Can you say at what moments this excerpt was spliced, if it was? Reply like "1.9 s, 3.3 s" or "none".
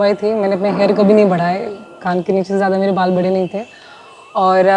none